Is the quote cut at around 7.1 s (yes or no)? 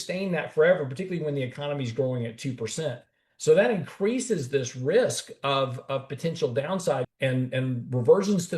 yes